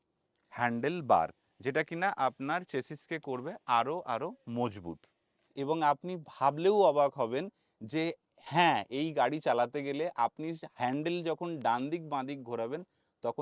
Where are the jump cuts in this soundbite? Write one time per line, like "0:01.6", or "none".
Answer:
0:05.5